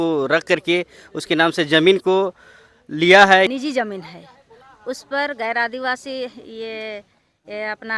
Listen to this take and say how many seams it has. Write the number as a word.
one